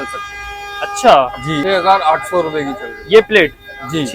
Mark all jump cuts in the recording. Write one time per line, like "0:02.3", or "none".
0:01.5